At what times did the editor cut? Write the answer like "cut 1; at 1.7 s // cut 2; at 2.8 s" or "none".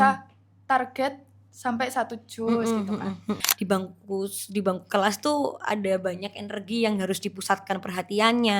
cut 1; at 3.5 s